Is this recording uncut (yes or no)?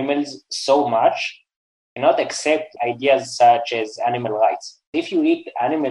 no